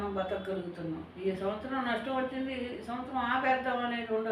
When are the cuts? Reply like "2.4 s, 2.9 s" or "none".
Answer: 1.1 s

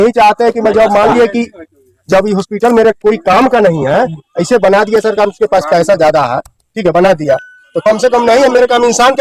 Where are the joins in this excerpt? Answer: none

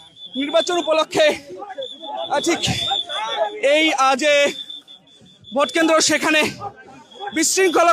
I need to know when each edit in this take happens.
none

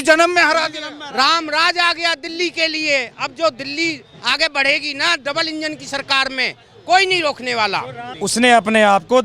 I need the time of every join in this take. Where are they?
8.0 s

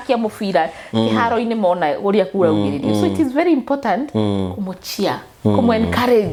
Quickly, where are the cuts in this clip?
none

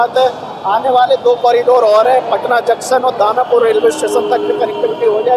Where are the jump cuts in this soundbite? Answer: none

